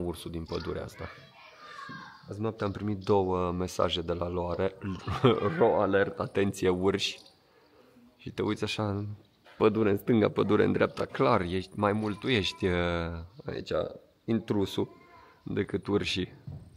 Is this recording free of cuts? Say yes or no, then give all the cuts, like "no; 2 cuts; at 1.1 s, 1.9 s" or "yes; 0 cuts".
yes; 0 cuts